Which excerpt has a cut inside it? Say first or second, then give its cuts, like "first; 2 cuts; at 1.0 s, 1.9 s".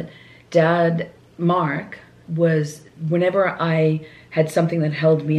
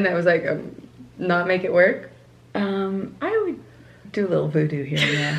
first; 1 cut; at 1.2 s